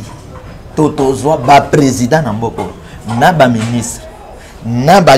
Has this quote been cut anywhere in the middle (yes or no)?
no